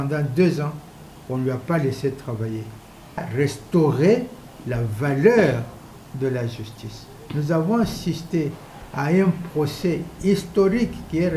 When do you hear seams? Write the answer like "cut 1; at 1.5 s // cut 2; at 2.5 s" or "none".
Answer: cut 1; at 3.3 s